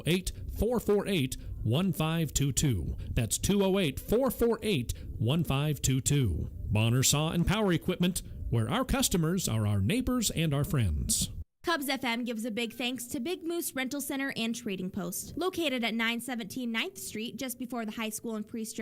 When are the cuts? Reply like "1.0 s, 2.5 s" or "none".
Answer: 11.4 s